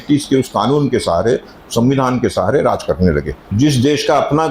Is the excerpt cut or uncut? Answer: cut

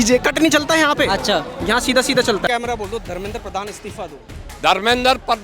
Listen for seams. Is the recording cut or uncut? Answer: cut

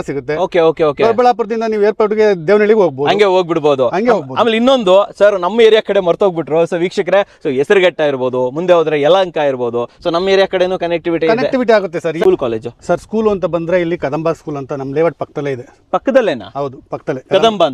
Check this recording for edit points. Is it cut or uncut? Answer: cut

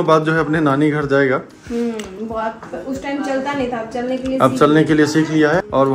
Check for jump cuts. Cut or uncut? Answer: uncut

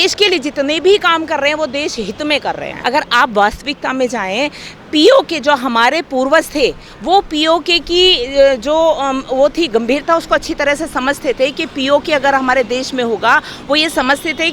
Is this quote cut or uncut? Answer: cut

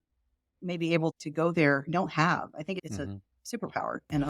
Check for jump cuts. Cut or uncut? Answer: cut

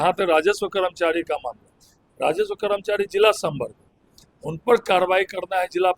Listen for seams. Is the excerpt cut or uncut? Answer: uncut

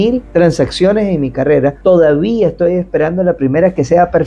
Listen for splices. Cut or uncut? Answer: uncut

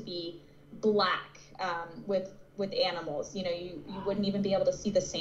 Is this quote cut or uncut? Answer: uncut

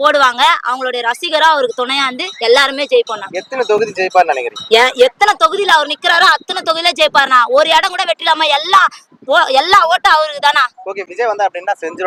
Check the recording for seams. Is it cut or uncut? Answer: uncut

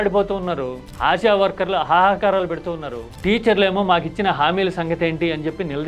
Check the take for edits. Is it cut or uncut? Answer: uncut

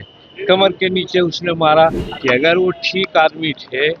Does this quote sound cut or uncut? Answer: cut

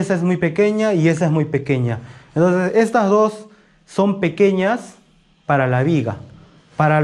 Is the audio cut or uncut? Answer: uncut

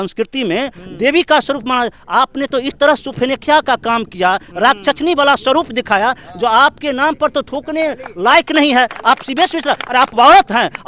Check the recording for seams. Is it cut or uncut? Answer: uncut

